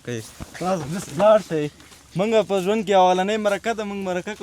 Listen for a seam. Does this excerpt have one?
no; 0 cuts

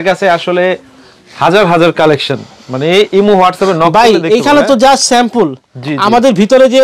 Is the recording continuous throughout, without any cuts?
yes; 0 cuts

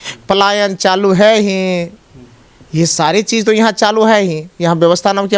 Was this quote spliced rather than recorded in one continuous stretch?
no; 0 cuts

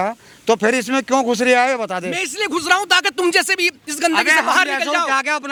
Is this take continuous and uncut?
yes; 0 cuts

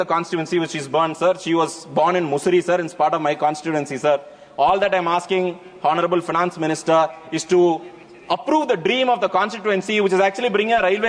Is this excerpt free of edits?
yes; 0 cuts

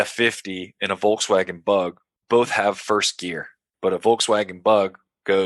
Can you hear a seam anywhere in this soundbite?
yes; 1 cut; at 3.7 s

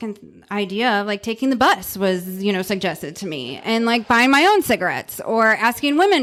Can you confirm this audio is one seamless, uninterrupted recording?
yes; 0 cuts

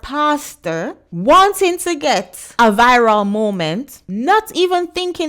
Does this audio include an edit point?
yes; 3 cuts; at 1.0 s, 2.4 s, 4.0 s

